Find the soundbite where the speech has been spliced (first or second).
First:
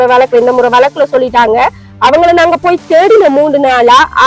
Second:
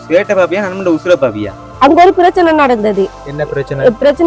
second